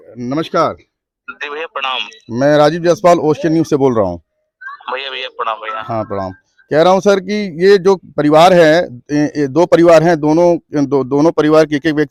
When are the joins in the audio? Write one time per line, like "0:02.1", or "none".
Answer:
none